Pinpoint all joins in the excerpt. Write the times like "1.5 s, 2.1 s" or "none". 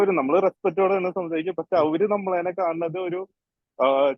none